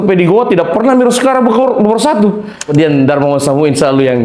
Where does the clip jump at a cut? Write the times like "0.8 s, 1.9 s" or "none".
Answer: 2.7 s